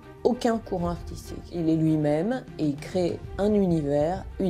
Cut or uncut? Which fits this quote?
cut